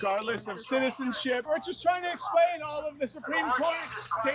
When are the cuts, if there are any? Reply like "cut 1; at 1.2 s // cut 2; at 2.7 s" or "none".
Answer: cut 1; at 1.4 s